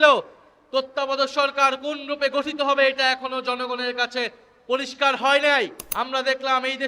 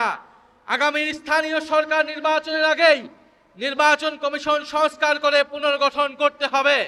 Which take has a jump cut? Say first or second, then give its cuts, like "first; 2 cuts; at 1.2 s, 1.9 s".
first; 1 cut; at 5.9 s